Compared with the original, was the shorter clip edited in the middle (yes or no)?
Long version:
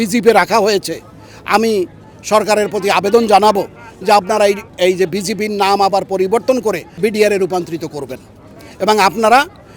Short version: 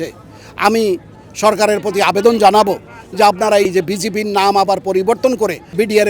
yes